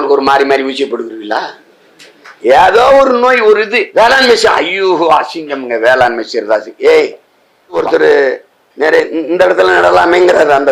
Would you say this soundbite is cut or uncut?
cut